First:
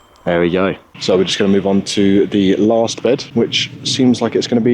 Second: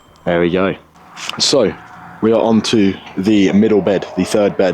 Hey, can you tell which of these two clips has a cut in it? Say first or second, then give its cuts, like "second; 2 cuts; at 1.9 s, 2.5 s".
first; 2 cuts; at 0.9 s, 3.3 s